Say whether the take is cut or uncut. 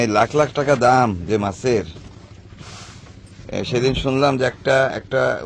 uncut